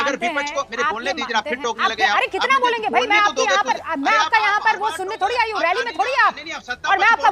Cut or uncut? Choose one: uncut